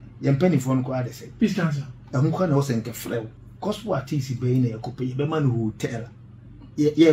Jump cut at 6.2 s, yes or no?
no